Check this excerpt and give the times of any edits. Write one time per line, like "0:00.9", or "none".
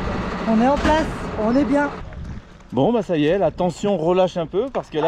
0:02.1